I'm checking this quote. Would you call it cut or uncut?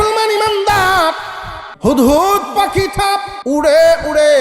cut